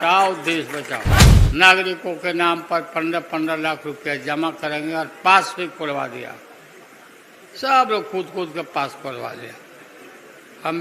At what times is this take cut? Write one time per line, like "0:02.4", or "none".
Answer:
0:01.2